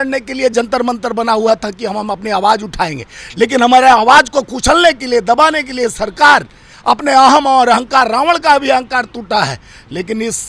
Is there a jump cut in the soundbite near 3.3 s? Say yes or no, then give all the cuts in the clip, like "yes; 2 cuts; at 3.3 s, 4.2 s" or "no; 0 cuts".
no; 0 cuts